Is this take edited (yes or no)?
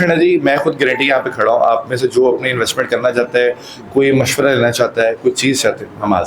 no